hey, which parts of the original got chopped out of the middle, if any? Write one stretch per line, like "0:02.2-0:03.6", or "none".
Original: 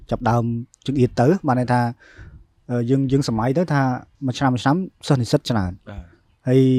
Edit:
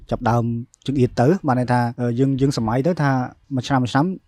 0:01.9-0:02.6